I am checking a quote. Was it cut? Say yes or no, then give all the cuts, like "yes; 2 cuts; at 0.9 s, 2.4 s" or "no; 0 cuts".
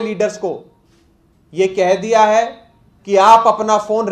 no; 0 cuts